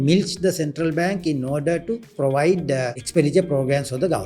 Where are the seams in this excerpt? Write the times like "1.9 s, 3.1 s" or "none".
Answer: 2.1 s, 3.0 s